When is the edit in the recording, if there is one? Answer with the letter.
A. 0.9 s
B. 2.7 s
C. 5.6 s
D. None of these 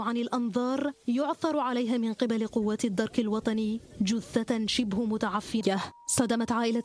D